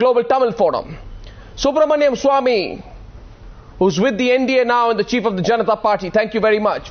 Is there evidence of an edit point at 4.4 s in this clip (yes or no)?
yes